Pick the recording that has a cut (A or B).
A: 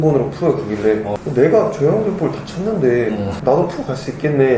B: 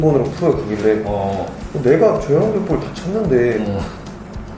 A